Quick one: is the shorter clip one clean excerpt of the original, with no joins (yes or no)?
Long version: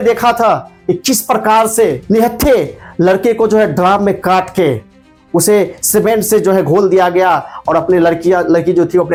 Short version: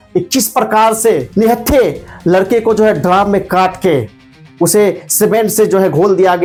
yes